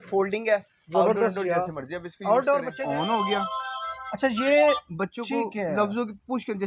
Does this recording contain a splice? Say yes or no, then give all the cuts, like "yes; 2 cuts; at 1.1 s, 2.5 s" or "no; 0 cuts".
yes; 1 cut; at 2.7 s